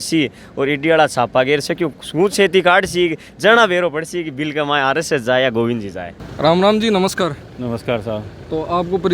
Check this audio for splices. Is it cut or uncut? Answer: uncut